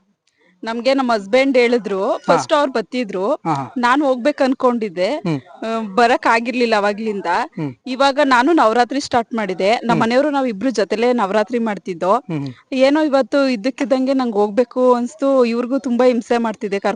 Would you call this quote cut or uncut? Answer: uncut